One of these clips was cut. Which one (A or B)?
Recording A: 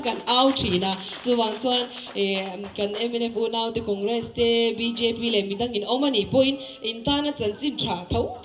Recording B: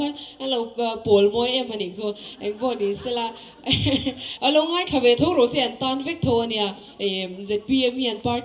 B